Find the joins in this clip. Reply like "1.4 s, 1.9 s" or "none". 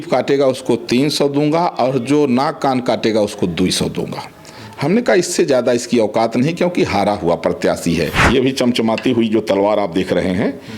8.2 s

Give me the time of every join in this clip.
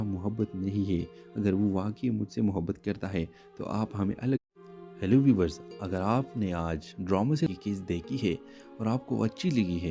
4.4 s

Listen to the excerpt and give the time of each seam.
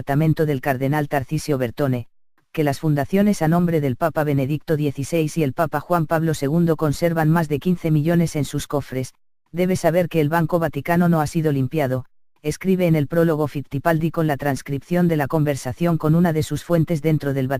12.7 s

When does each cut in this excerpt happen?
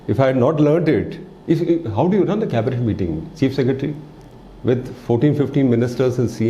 none

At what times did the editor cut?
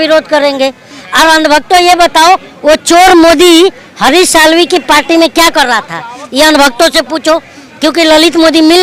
none

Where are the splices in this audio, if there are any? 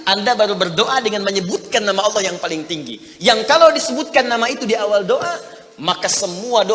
none

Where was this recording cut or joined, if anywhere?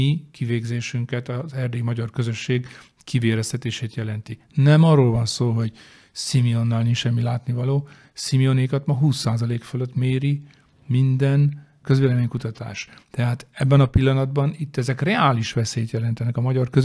11.7 s

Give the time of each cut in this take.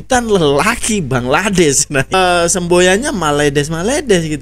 2.1 s

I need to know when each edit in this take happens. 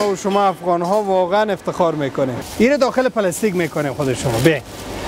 2.4 s

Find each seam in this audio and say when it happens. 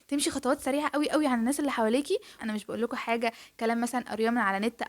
2.4 s

